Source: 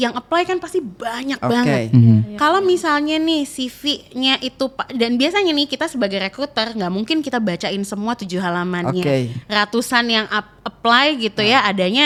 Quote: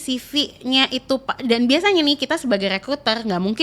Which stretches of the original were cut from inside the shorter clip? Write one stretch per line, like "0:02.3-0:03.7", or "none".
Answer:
none